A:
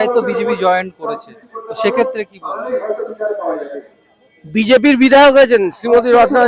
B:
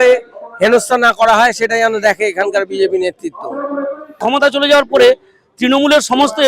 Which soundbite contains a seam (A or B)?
B